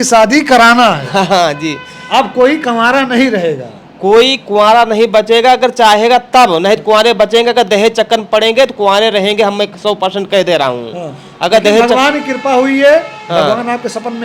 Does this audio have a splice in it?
no; 0 cuts

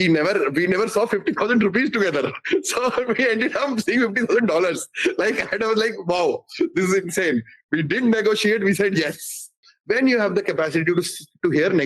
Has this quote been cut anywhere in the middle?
yes; 1 cut; at 9.7 s

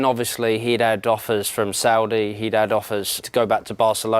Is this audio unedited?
no; 1 cut; at 3.2 s

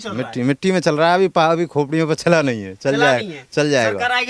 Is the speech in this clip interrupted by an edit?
no; 0 cuts

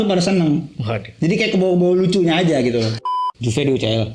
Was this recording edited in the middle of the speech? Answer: yes; 1 cut; at 3.0 s

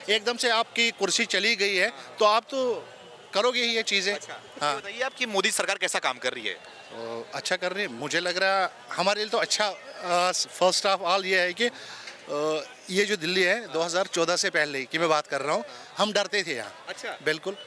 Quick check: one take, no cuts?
yes; 0 cuts

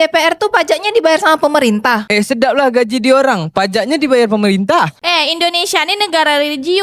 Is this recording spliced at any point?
yes; 1 cut; at 2.1 s

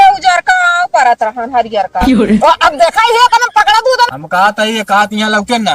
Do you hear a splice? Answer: yes; 1 cut; at 4.1 s

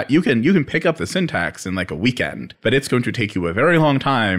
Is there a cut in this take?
yes; 1 cut; at 2.4 s

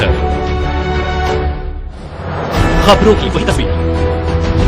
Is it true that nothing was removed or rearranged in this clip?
no; 1 cut; at 3.4 s

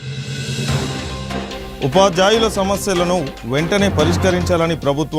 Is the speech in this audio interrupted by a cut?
yes; 1 cut; at 0.9 s

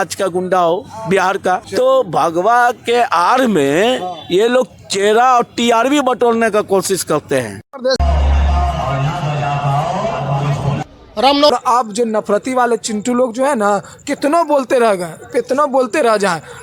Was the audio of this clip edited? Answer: yes; 2 cuts; at 8.0 s, 11.5 s

